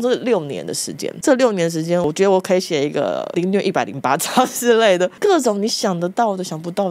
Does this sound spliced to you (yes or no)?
no